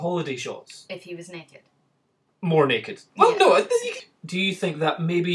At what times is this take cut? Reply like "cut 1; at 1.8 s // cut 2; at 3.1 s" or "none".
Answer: cut 1; at 4.0 s